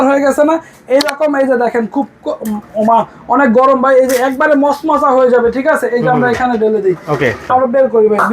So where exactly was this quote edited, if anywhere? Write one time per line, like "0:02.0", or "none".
0:07.4

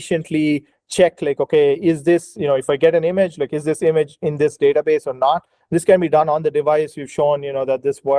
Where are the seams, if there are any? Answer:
none

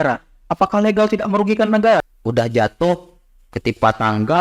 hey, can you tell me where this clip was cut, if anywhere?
0:02.0

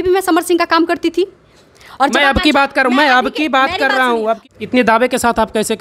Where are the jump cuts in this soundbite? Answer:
0:04.4

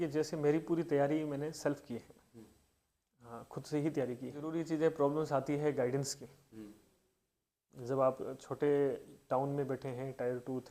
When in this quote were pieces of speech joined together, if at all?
0:04.5

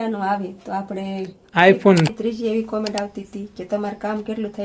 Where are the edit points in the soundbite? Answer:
0:02.1

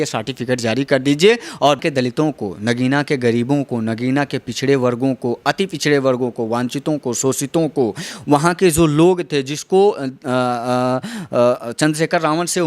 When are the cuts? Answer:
0:01.8

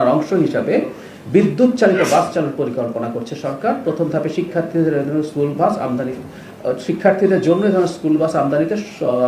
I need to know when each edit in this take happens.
none

